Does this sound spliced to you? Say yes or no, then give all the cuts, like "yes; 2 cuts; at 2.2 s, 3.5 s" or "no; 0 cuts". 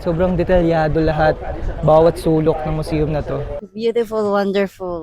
yes; 1 cut; at 3.5 s